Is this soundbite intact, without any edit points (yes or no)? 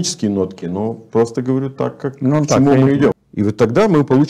no